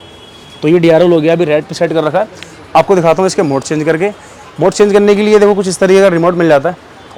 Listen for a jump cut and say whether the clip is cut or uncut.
uncut